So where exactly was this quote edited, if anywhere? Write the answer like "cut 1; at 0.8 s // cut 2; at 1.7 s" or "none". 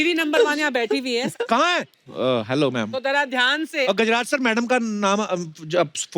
cut 1; at 1.8 s // cut 2; at 3.9 s